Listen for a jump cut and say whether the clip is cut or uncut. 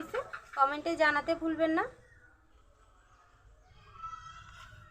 cut